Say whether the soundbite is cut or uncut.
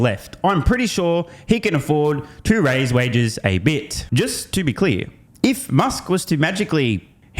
cut